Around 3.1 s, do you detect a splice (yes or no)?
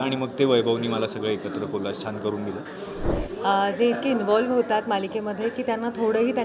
yes